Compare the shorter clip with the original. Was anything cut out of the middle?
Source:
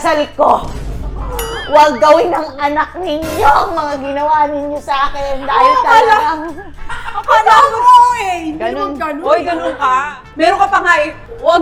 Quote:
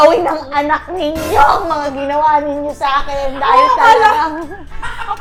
no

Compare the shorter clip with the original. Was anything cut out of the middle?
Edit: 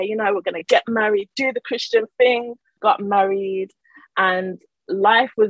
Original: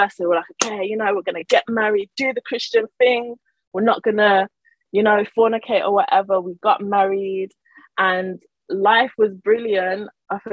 yes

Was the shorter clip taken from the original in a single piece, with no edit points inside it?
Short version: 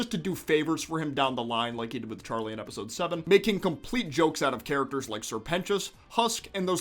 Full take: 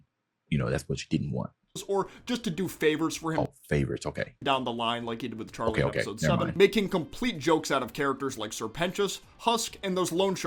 no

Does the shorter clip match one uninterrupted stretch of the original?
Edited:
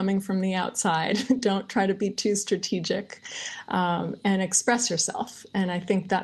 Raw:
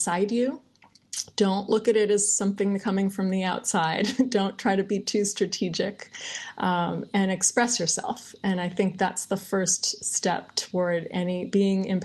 yes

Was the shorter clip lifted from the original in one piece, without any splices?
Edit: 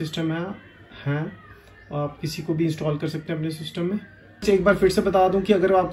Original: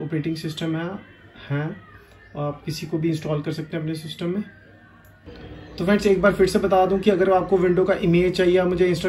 no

